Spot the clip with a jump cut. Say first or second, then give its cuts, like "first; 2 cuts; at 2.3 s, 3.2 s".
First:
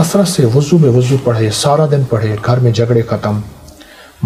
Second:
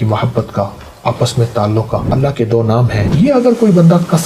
second; 2 cuts; at 2.1 s, 3.0 s